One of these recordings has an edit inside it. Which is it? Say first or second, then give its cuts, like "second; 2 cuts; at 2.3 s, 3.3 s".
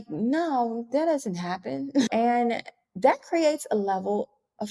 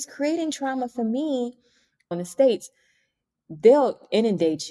second; 1 cut; at 2.1 s